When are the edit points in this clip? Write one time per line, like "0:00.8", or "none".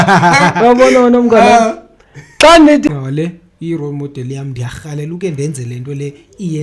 0:02.9